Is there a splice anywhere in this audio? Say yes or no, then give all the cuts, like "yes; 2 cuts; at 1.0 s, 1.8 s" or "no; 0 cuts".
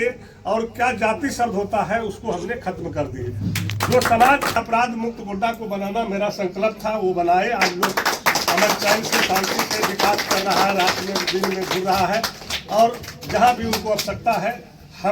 yes; 1 cut; at 4.6 s